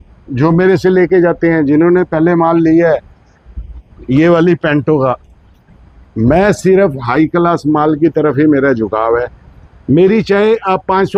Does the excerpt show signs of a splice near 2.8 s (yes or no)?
no